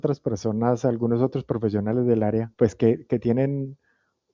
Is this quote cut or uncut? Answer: cut